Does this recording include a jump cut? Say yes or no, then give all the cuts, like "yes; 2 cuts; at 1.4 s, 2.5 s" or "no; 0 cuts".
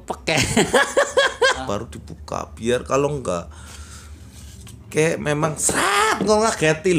yes; 1 cut; at 1.7 s